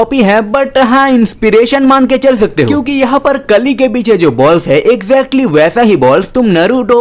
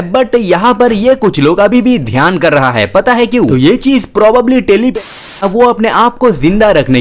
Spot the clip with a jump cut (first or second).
second